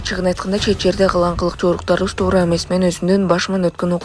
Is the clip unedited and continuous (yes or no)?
yes